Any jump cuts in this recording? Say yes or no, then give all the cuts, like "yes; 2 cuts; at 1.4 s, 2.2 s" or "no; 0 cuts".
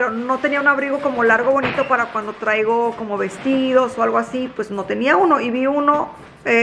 no; 0 cuts